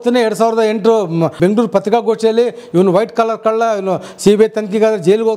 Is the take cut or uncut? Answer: cut